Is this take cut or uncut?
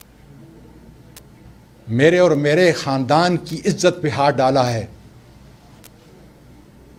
uncut